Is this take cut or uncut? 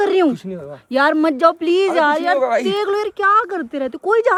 uncut